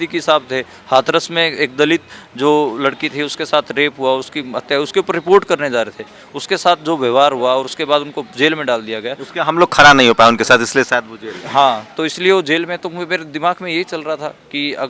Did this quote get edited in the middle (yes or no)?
no